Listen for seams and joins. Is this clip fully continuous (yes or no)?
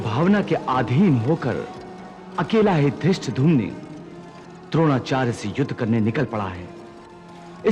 yes